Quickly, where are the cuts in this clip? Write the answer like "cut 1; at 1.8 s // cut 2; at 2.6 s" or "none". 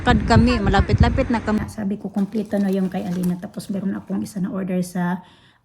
cut 1; at 1.6 s